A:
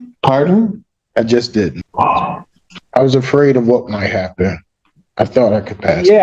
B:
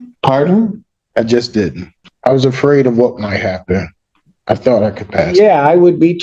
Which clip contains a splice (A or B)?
B